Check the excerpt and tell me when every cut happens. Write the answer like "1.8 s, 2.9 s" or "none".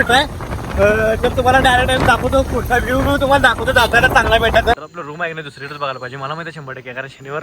4.8 s